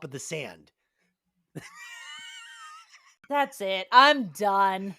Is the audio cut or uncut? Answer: cut